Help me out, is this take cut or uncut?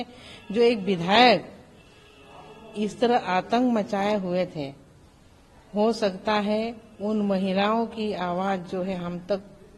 uncut